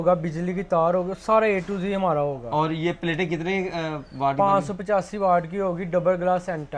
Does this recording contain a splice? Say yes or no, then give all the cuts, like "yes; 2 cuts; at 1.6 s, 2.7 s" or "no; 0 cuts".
no; 0 cuts